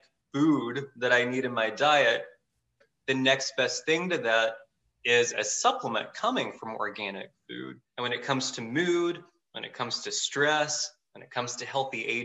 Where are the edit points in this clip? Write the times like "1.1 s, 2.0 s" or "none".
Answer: 2.8 s, 7.8 s